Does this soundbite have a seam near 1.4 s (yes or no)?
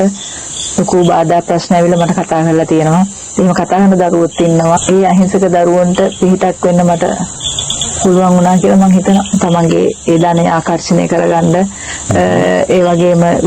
no